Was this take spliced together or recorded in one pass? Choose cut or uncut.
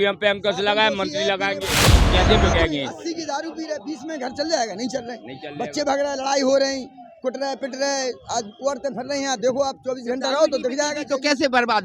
cut